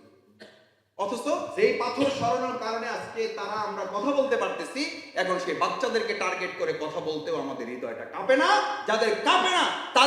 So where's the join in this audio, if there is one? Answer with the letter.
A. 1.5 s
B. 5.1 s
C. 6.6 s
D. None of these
A